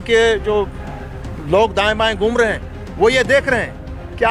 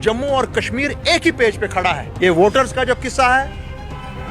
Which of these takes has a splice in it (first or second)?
second